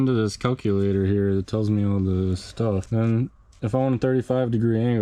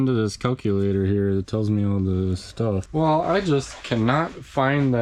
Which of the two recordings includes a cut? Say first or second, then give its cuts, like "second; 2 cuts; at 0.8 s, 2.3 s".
second; 1 cut; at 2.9 s